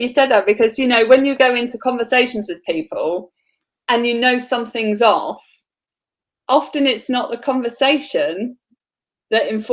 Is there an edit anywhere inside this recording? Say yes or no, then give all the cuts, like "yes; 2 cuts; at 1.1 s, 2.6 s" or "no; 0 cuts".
no; 0 cuts